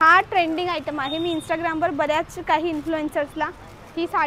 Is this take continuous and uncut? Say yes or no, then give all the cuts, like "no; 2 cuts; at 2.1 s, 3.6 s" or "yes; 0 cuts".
yes; 0 cuts